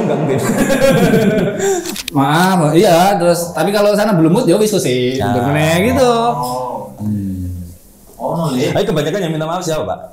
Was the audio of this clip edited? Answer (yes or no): yes